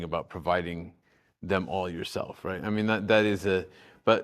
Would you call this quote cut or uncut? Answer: uncut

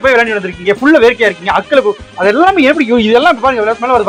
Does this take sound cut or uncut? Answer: uncut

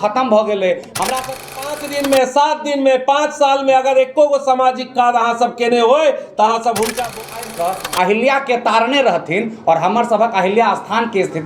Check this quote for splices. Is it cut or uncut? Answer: cut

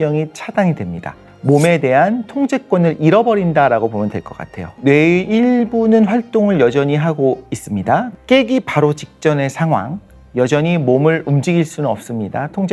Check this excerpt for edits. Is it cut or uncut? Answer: uncut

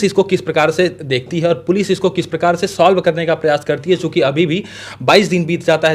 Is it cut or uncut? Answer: uncut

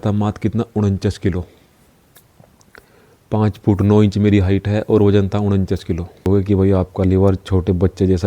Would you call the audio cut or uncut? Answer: cut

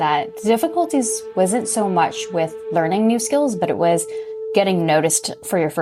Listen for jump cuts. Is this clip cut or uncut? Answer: uncut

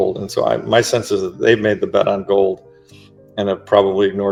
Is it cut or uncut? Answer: uncut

